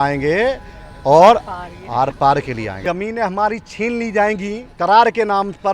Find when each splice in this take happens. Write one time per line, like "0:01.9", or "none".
0:02.7
0:04.7